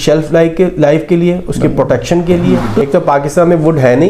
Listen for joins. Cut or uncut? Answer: cut